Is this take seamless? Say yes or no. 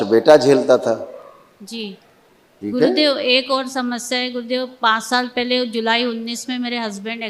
no